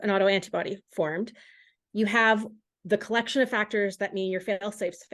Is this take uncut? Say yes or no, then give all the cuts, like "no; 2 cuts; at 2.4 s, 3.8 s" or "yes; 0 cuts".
yes; 0 cuts